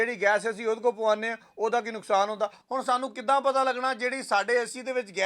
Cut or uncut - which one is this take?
cut